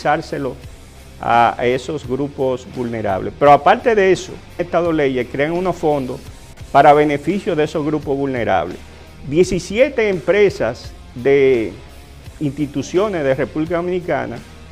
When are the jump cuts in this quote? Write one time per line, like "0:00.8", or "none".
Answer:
none